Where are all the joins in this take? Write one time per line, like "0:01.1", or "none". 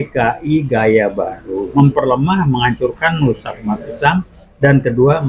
0:01.7